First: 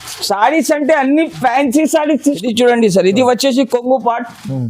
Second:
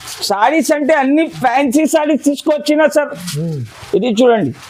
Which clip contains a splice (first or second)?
first